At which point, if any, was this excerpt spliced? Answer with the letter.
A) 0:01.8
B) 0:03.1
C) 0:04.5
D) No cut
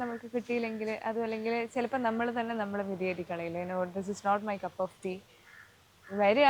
D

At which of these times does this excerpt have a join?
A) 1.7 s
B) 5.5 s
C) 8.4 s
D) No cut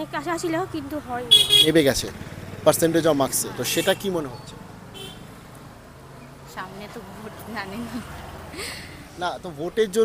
A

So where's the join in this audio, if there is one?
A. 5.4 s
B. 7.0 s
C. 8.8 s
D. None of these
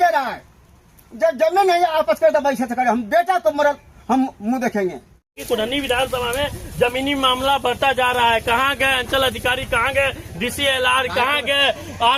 A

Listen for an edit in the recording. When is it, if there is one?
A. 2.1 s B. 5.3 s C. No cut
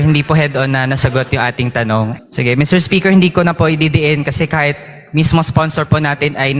A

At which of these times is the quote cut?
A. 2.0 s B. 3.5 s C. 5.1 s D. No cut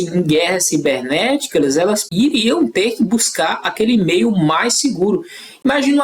A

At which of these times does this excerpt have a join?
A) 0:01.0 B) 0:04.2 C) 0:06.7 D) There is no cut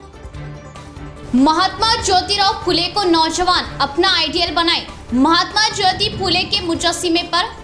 A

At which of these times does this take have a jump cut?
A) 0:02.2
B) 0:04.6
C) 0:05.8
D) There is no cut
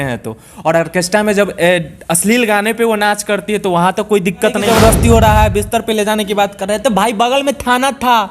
B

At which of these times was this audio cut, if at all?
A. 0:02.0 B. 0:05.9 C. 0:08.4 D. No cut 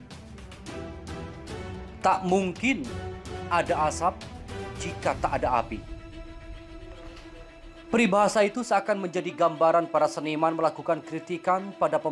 A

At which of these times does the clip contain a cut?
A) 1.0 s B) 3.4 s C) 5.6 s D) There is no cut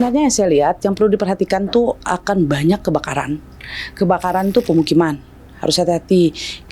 D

